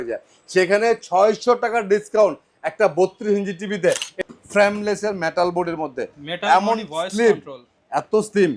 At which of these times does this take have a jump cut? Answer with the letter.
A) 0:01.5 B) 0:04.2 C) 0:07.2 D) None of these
B